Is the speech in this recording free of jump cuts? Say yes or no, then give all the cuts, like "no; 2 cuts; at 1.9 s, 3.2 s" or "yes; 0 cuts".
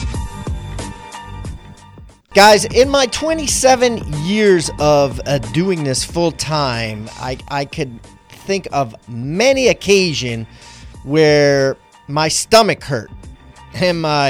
no; 1 cut; at 1.9 s